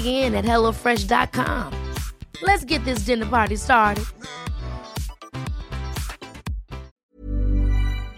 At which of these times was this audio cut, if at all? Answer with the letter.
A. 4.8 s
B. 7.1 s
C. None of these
B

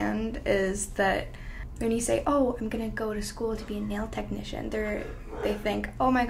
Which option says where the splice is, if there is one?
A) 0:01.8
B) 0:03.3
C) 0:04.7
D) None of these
D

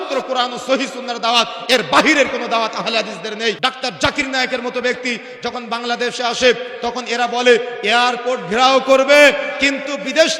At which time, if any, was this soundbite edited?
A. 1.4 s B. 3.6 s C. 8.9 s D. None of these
B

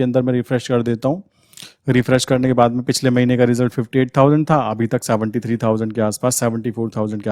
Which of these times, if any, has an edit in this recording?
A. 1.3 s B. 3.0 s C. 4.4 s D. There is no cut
D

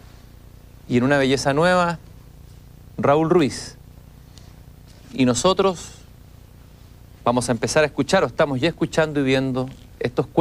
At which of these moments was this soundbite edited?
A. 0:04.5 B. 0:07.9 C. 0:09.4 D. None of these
B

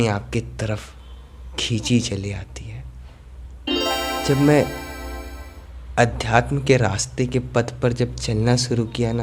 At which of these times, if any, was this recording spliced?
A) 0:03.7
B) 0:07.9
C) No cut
A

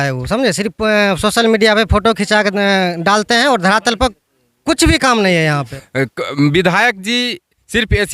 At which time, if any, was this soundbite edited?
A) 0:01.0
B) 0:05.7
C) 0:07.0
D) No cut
B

